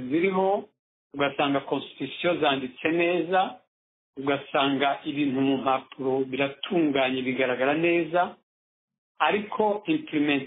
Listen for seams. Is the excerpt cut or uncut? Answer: uncut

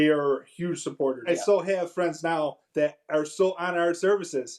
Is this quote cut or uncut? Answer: cut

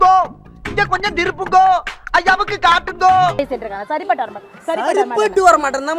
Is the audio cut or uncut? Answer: cut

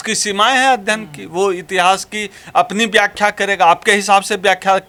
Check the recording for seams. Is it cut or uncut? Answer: uncut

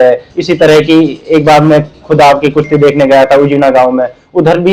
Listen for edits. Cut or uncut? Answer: uncut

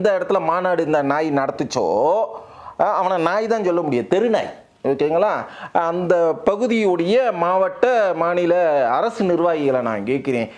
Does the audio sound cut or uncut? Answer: uncut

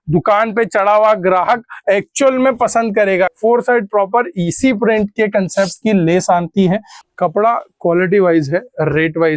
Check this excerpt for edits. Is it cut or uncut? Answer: cut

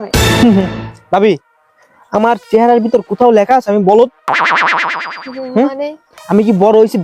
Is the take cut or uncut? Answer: uncut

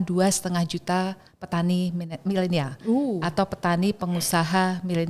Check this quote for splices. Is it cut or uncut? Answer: uncut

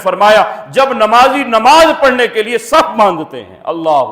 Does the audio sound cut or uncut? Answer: uncut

